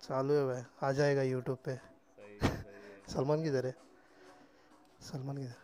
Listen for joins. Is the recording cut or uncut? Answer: uncut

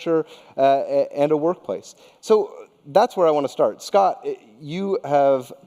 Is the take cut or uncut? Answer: cut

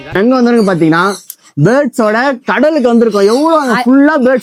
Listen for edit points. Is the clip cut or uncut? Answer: uncut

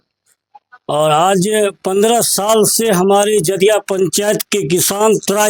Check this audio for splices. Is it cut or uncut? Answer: uncut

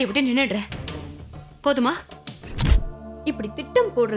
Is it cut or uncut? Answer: cut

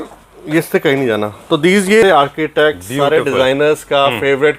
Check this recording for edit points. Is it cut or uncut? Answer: cut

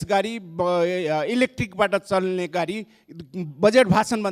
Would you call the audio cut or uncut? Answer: uncut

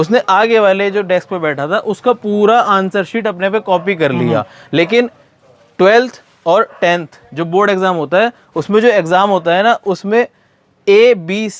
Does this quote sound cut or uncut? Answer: uncut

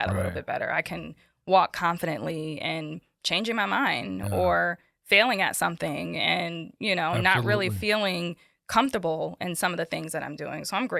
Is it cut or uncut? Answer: uncut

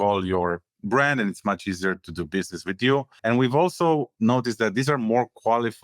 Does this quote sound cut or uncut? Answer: cut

